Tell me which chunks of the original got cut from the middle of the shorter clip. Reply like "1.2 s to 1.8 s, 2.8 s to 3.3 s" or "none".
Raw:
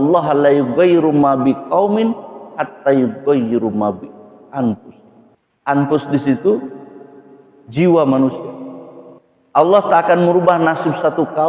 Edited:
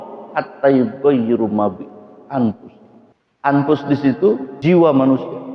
6.7 s to 7.6 s